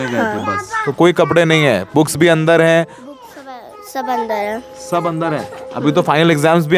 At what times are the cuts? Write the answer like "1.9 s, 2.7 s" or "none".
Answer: none